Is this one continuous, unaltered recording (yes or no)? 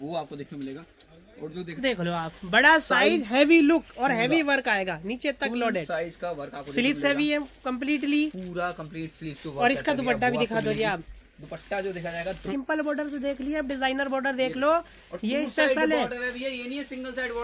no